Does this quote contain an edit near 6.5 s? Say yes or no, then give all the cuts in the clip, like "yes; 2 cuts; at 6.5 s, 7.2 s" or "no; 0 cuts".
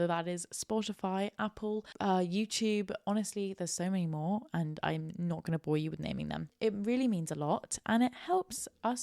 yes; 1 cut; at 6.5 s